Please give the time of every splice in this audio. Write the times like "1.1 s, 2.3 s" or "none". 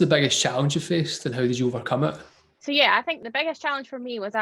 2.3 s, 3.2 s